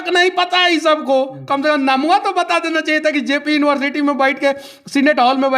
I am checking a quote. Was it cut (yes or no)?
no